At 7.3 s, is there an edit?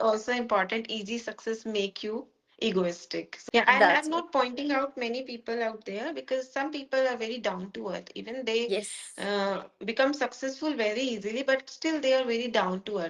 no; 1 cut; at 3.3 s

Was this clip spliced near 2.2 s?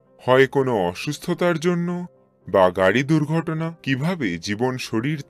no; 1 cut; at 3.7 s

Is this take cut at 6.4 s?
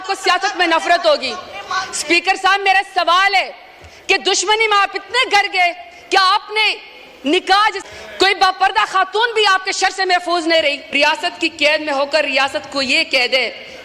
no; 1 cut; at 7.9 s

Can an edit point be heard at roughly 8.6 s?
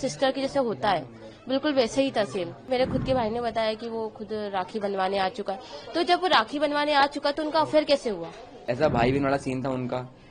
yes; 2 cuts; at 2.6 s, 8.6 s

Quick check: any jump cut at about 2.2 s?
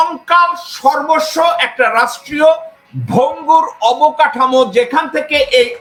no; 0 cuts

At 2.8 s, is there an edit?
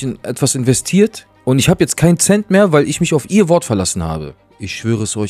no; 2 cuts; at 1.3 s, 4.3 s

